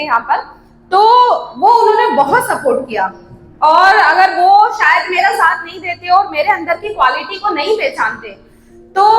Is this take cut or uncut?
uncut